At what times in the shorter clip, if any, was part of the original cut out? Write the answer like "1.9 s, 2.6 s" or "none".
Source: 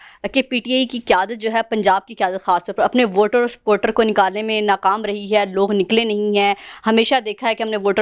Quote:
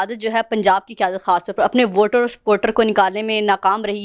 none